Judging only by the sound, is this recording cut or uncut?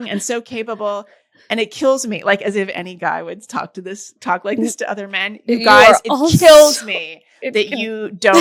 uncut